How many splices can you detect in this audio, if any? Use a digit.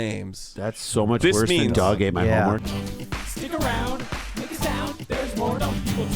1